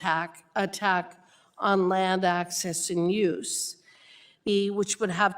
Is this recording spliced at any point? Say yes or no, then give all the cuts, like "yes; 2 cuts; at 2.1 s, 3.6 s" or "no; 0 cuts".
yes; 1 cut; at 4.5 s